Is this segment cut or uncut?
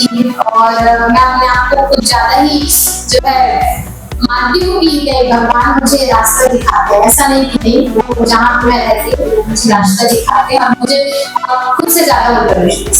uncut